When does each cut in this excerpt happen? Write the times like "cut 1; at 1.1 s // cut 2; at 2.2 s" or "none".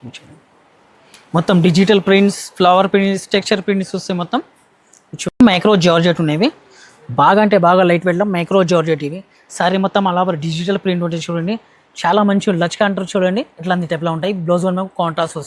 cut 1; at 5.4 s